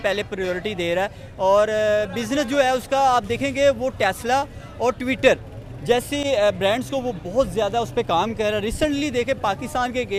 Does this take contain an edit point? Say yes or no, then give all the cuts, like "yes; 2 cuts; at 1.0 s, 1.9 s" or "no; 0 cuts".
no; 0 cuts